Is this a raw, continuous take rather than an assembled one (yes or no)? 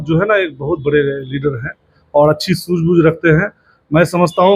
yes